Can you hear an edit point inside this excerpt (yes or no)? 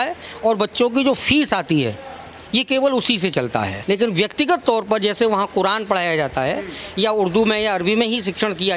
yes